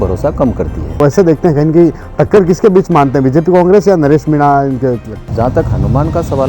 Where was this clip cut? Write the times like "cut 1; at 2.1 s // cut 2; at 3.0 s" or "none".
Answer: cut 1; at 1.0 s // cut 2; at 5.2 s